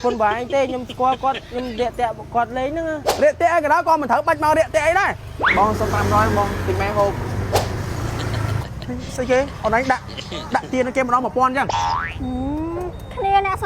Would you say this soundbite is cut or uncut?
cut